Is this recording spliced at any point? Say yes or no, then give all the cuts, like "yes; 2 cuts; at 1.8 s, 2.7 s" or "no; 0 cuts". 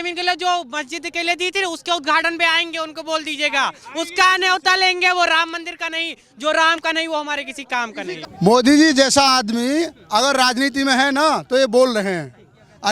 yes; 1 cut; at 8.2 s